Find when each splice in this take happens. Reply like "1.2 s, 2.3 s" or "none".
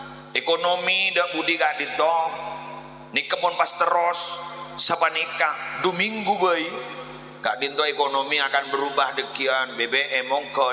none